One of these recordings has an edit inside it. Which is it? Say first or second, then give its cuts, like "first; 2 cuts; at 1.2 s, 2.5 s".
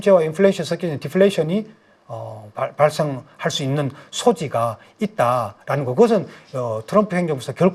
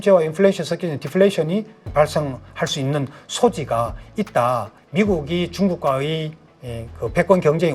second; 2 cuts; at 1.9 s, 4.7 s